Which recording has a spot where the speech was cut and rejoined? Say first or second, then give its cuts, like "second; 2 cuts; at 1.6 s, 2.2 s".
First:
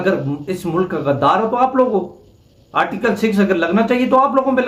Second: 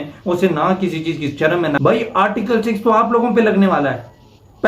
second; 1 cut; at 1.8 s